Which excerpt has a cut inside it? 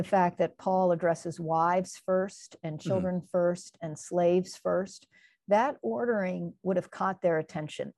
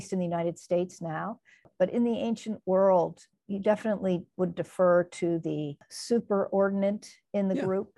second; 3 cuts; at 1.7 s, 3.3 s, 5.9 s

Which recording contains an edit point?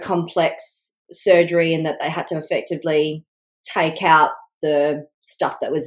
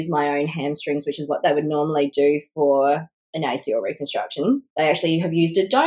second; 1 cut; at 4.7 s

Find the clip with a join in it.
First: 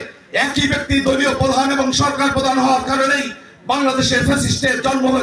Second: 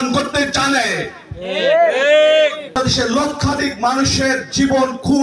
second; 1 cut; at 2.8 s

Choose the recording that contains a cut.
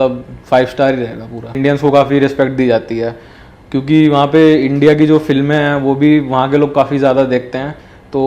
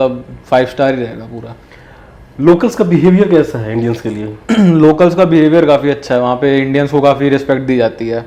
first; 1 cut; at 1.6 s

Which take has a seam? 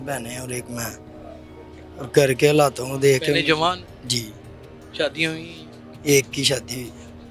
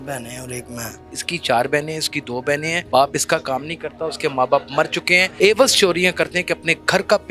second; 3 cuts; at 1.2 s, 2.8 s, 5.3 s

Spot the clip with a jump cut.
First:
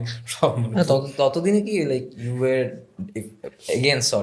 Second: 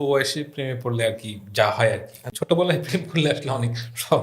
second; 1 cut; at 2.2 s

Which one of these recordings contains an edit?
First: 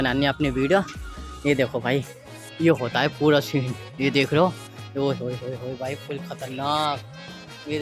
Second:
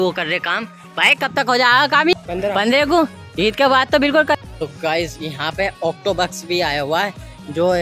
second; 2 cuts; at 2.1 s, 4.5 s

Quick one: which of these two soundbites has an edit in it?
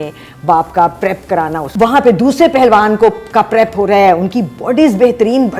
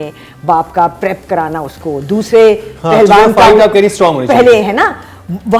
first; 1 cut; at 1.6 s

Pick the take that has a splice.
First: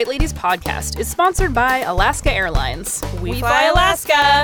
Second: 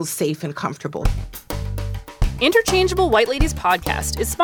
second; 1 cut; at 1.0 s

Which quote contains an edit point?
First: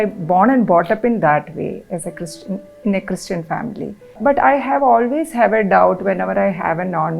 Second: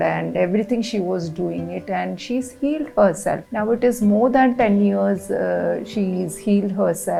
first; 1 cut; at 4.2 s

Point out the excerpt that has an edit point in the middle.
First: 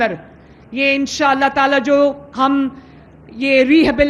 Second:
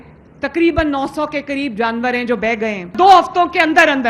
second; 1 cut; at 2.9 s

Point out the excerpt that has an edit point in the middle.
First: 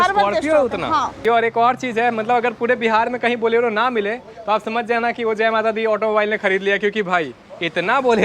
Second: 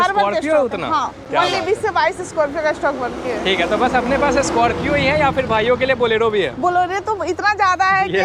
first; 1 cut; at 1.2 s

